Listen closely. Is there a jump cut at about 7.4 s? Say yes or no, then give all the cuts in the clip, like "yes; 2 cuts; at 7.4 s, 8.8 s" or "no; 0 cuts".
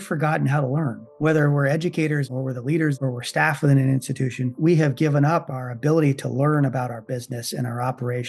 no; 3 cuts; at 1.0 s, 2.6 s, 4.6 s